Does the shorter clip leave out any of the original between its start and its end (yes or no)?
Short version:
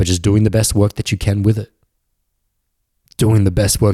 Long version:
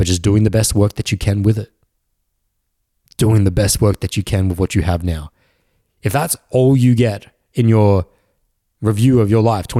no